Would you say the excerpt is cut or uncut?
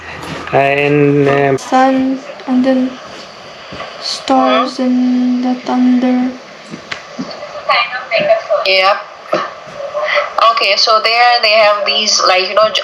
cut